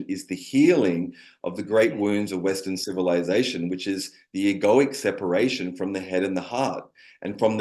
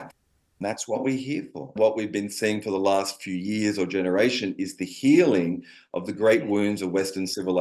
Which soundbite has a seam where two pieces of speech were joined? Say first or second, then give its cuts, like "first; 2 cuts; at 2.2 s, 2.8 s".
second; 1 cut; at 1.7 s